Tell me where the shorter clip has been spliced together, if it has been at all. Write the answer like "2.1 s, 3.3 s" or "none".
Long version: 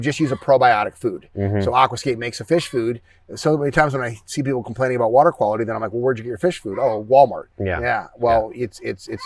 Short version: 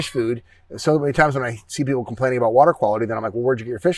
none